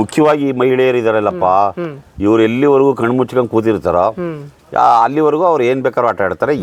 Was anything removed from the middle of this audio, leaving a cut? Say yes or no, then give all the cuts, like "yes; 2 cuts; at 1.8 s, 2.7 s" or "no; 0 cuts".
no; 0 cuts